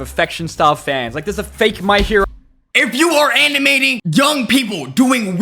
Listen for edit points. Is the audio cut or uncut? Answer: cut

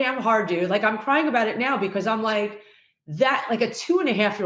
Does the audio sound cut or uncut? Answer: uncut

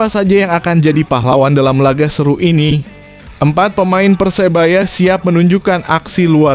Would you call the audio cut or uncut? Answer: uncut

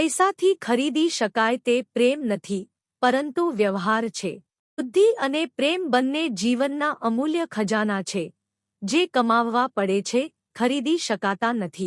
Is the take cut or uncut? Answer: cut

